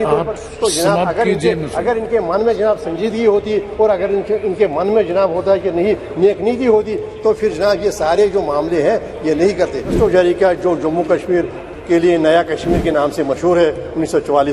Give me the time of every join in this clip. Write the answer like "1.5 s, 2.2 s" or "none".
9.9 s